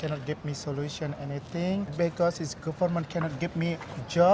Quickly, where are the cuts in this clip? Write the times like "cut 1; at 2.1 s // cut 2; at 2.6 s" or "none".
cut 1; at 1.9 s